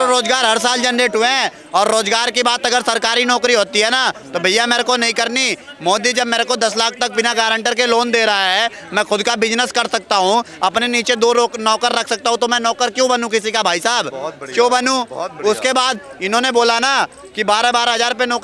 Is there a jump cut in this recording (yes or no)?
no